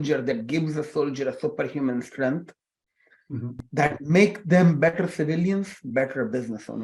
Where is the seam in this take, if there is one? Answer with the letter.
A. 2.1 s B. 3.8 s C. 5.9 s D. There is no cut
C